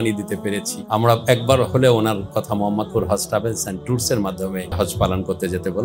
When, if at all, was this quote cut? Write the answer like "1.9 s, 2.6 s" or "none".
0.8 s, 4.7 s